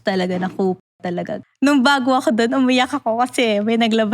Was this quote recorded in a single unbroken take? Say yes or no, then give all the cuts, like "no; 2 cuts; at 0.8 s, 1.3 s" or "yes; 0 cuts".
no; 1 cut; at 1.4 s